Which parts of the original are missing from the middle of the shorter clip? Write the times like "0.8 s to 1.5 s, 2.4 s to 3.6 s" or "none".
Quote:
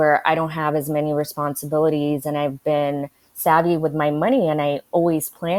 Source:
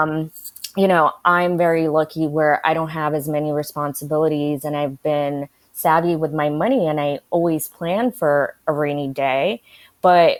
none